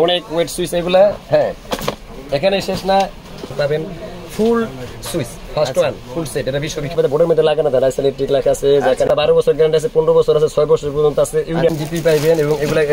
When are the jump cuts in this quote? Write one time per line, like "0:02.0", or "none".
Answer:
0:03.5
0:06.9
0:09.1
0:11.7